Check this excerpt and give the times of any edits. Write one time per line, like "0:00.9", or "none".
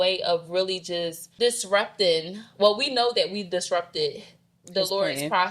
0:01.2